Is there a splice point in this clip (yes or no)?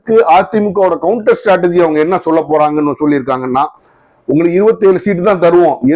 no